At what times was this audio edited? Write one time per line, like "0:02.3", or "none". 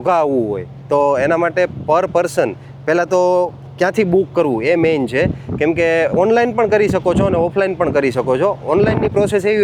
none